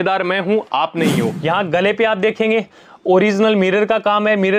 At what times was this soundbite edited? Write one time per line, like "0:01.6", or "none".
0:01.4